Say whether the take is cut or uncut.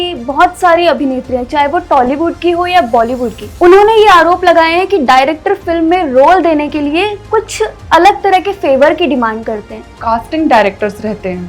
cut